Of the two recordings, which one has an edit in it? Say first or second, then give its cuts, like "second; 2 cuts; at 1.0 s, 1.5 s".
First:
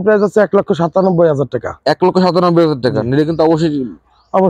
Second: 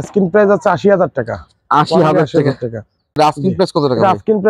second; 1 cut; at 3.2 s